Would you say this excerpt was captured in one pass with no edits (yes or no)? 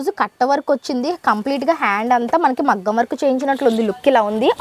yes